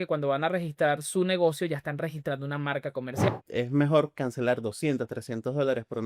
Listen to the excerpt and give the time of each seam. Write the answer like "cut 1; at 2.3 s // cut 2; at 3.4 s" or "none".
cut 1; at 3.3 s